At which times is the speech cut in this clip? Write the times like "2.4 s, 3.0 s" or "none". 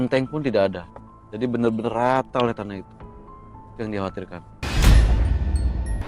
4.4 s